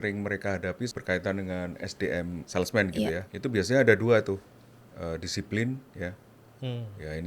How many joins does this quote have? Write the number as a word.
three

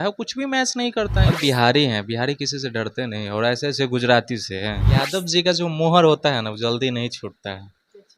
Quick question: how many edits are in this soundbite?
two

